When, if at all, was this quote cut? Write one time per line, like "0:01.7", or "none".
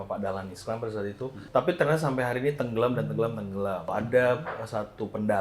0:01.4
0:03.9